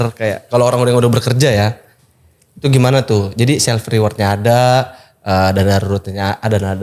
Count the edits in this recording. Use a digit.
0